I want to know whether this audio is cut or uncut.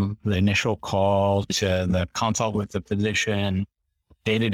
uncut